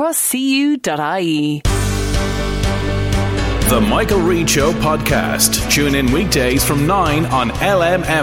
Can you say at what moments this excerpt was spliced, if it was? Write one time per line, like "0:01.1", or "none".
0:01.6